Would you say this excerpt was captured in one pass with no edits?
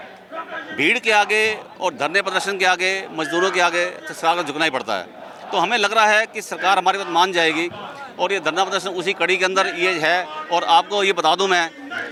yes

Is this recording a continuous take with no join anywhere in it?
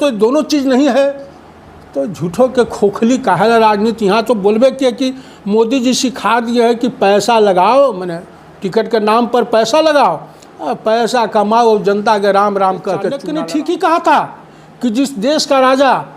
no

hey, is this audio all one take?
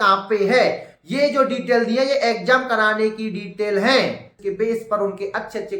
no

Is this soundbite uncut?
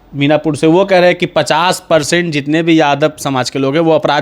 yes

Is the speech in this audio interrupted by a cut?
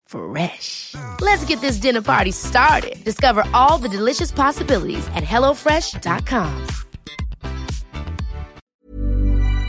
yes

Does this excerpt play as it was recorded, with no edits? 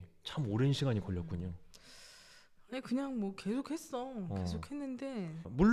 yes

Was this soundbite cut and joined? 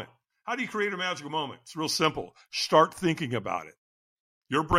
no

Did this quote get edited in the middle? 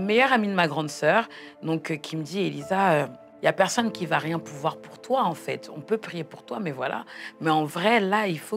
yes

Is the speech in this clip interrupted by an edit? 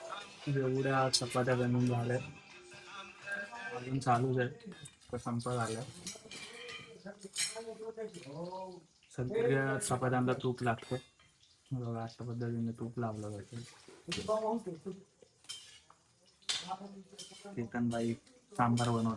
no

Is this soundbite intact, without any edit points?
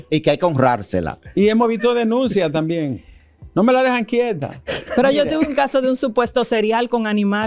yes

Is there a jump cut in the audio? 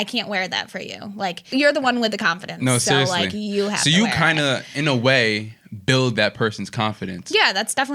yes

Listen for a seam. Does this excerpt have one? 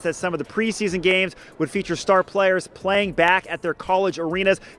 no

